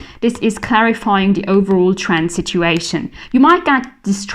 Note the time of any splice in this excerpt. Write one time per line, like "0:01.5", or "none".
none